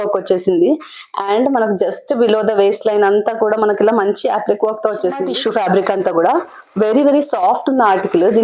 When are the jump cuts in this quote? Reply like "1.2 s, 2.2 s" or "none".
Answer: 5.2 s